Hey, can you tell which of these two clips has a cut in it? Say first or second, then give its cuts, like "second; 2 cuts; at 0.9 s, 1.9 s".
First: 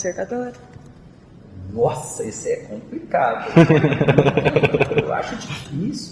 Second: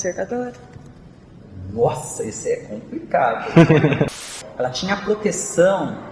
second; 1 cut; at 4.1 s